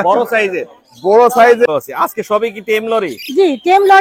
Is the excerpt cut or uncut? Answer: cut